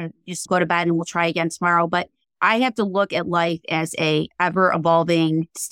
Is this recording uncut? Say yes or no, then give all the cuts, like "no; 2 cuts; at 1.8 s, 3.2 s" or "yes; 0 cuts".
yes; 0 cuts